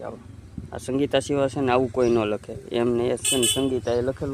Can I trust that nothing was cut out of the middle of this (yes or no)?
yes